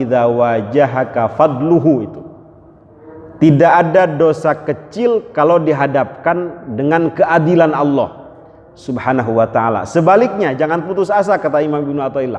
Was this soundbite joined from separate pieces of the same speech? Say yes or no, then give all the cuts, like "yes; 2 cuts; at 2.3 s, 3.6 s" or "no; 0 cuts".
no; 0 cuts